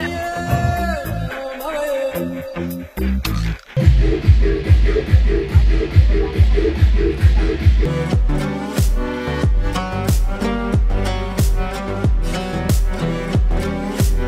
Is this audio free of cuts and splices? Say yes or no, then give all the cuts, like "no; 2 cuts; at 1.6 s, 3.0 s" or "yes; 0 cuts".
yes; 0 cuts